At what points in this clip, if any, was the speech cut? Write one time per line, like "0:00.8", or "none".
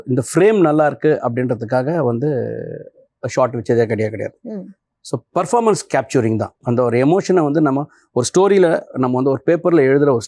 none